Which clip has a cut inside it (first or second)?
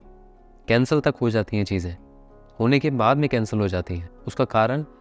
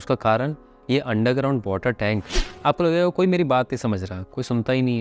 second